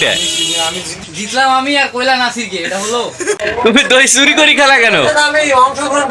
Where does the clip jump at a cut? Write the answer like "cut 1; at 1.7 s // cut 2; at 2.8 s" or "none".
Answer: cut 1; at 1.0 s // cut 2; at 3.4 s